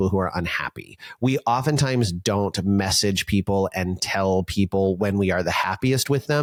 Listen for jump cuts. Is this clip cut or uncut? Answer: uncut